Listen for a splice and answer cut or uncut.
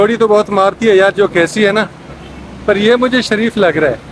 uncut